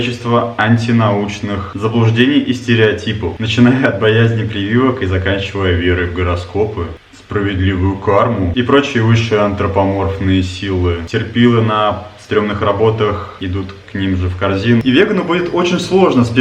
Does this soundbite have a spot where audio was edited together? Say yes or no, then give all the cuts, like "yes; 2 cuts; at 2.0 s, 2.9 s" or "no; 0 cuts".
yes; 3 cuts; at 11.0 s, 13.3 s, 14.8 s